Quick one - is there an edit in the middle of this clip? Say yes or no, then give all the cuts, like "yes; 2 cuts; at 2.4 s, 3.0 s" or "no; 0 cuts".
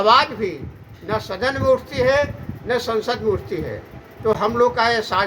no; 0 cuts